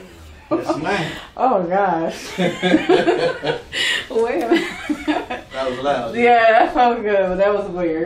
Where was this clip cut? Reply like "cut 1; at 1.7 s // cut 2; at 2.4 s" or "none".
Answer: none